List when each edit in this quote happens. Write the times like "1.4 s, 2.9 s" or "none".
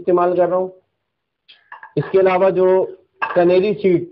none

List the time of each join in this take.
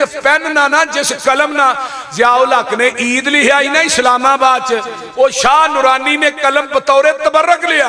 none

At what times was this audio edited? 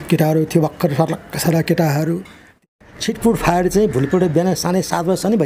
2.6 s

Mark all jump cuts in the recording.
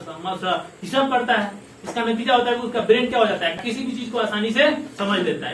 3.5 s

